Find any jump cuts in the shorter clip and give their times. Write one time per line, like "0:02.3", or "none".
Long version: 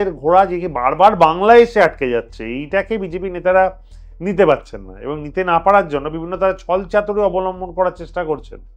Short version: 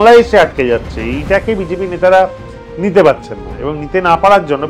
none